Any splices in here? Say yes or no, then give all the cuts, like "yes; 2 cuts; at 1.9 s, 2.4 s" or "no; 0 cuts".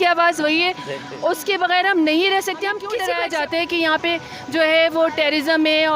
yes; 1 cut; at 3.0 s